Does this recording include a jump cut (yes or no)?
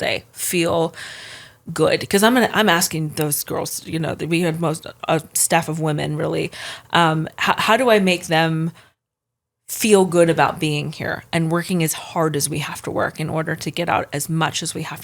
no